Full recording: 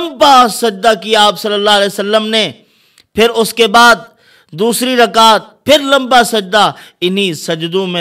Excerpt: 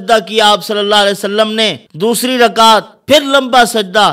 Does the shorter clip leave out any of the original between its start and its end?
yes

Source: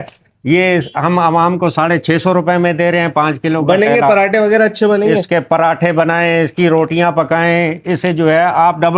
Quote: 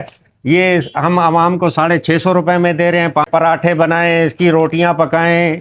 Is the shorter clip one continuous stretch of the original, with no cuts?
no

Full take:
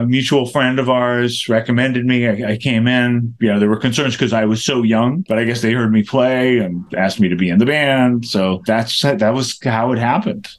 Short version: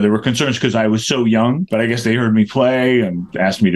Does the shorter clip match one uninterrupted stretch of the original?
yes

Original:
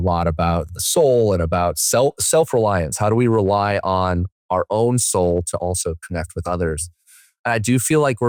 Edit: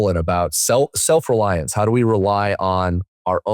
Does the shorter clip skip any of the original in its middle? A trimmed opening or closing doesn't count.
no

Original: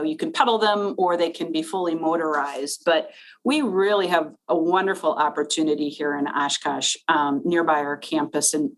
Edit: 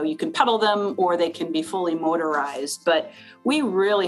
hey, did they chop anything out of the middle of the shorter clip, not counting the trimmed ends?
no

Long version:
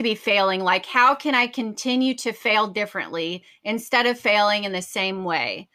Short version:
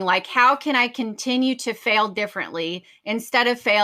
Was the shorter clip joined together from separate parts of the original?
no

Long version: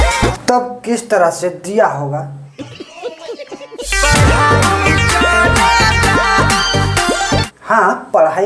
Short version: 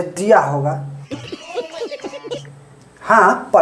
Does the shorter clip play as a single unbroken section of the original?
no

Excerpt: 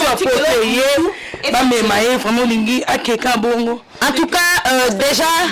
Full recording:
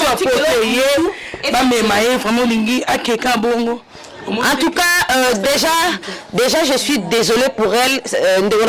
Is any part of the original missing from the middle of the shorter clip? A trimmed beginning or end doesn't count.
yes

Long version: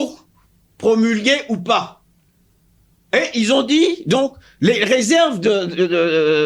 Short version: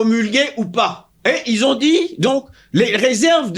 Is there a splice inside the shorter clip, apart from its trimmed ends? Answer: yes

